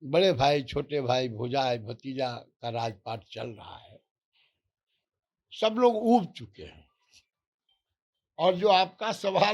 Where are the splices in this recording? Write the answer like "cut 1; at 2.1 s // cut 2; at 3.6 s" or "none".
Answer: none